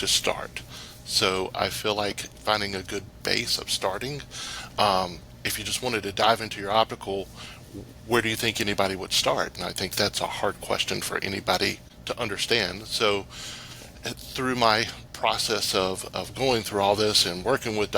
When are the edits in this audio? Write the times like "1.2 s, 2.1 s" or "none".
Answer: 11.9 s